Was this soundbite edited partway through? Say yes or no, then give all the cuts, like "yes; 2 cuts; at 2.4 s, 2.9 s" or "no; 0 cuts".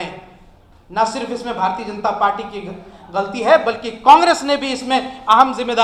no; 0 cuts